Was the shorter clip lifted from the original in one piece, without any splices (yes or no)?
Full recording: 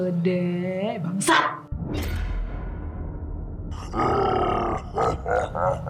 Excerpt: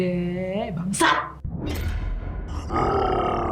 no